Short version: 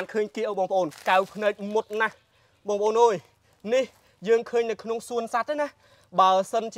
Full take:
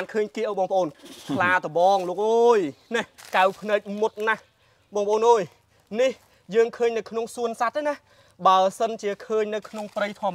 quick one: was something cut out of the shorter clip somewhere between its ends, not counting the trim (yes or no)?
yes